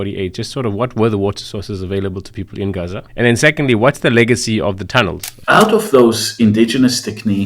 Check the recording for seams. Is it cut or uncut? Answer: cut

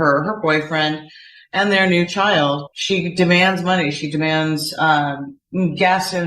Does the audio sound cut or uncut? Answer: cut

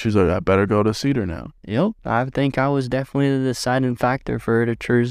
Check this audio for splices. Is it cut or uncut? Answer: cut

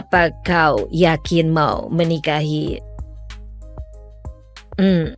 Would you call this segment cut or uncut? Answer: cut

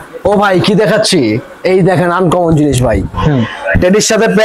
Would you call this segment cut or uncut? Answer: uncut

